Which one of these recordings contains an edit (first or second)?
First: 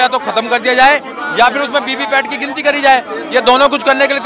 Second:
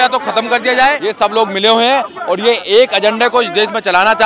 second